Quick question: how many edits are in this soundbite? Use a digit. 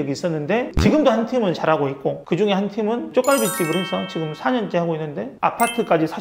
1